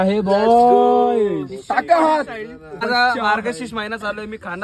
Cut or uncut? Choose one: cut